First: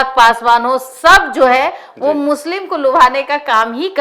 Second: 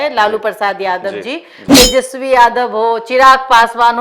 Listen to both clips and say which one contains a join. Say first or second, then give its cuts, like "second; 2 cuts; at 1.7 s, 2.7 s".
second; 1 cut; at 1.5 s